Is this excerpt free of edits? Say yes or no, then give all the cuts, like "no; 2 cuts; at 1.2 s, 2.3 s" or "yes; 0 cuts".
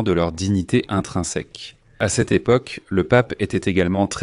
no; 1 cut; at 2.0 s